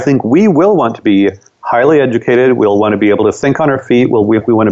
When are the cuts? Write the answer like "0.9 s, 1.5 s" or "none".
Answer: none